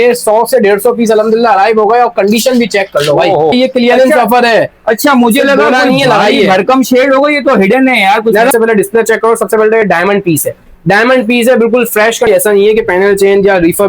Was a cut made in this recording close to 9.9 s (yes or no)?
no